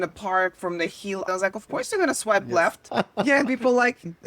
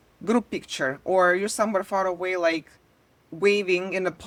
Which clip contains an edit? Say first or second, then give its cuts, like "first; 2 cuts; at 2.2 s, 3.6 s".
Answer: first; 2 cuts; at 1.2 s, 2.9 s